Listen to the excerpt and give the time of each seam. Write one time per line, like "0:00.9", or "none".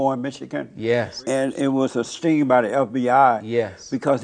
0:01.2
0:02.1